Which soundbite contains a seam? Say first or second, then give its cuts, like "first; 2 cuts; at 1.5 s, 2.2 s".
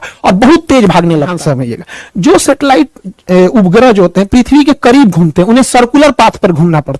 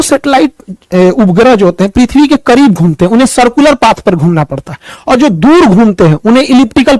first; 1 cut; at 1.4 s